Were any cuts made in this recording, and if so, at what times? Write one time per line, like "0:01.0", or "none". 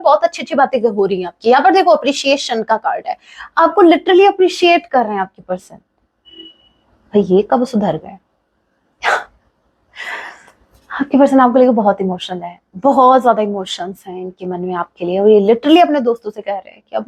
none